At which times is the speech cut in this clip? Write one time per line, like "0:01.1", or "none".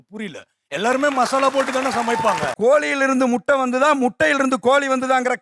0:02.5